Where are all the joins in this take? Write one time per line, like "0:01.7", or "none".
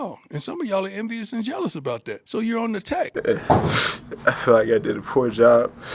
0:02.2
0:03.1